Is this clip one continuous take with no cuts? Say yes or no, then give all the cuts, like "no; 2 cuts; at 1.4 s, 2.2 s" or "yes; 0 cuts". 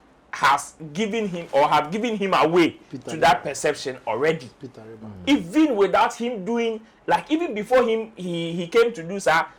yes; 0 cuts